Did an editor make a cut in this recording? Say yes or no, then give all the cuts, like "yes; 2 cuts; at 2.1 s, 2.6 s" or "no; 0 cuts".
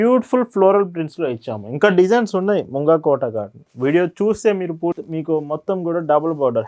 yes; 1 cut; at 5.0 s